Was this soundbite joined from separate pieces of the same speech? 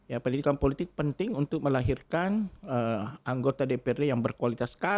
no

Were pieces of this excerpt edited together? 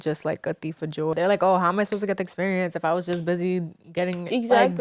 yes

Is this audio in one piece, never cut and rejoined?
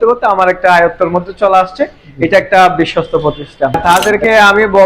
no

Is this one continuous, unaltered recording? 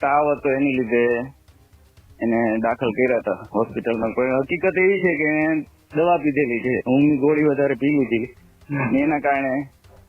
yes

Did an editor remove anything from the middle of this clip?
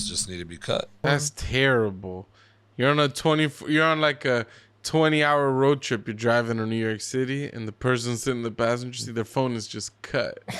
yes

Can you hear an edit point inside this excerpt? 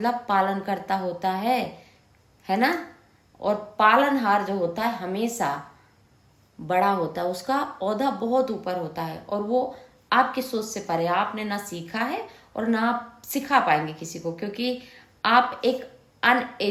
no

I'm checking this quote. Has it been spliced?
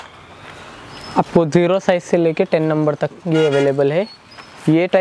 no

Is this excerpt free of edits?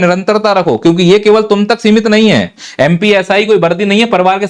yes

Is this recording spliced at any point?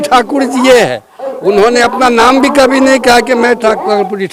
no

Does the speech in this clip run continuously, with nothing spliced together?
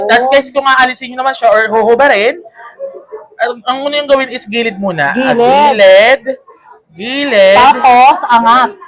yes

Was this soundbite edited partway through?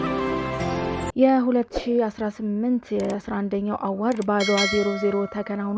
yes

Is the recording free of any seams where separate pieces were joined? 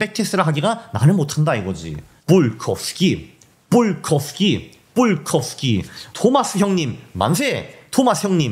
yes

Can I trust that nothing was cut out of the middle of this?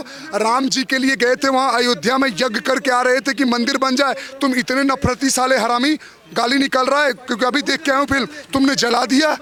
yes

